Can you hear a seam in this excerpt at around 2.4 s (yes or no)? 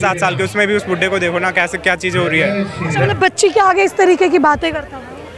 no